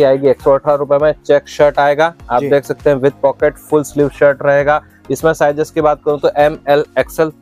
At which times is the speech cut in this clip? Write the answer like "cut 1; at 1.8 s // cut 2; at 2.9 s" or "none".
none

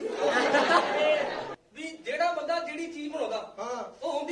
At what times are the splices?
cut 1; at 1.5 s

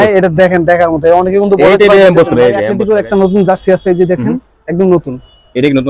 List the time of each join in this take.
cut 1; at 2.7 s

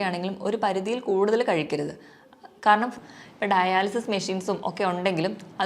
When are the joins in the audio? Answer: cut 1; at 2.9 s

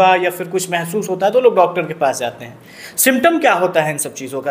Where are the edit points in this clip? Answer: none

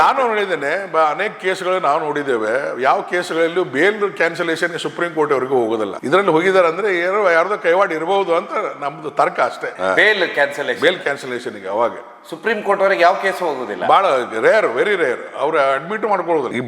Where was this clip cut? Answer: none

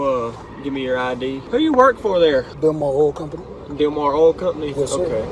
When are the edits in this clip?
cut 1; at 1.4 s // cut 2; at 2.5 s

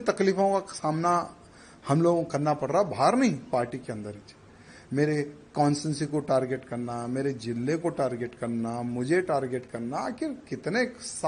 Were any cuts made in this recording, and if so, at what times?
none

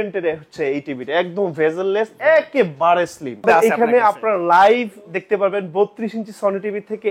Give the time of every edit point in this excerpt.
cut 1; at 3.4 s

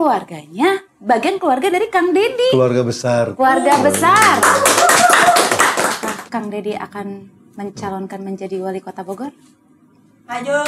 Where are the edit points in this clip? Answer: cut 1; at 6.0 s

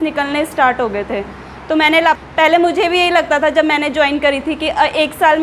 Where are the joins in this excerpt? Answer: cut 1; at 2.2 s

